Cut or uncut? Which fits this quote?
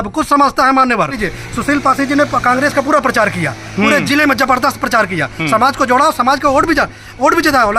cut